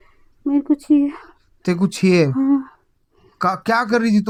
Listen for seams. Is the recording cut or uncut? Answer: uncut